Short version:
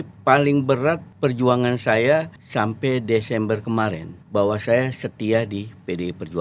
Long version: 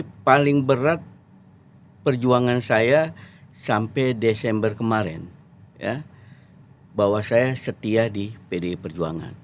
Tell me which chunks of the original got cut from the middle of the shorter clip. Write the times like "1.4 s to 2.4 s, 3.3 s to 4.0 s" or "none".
1.1 s to 1.9 s, 3.2 s to 3.5 s, 5.3 s to 6.8 s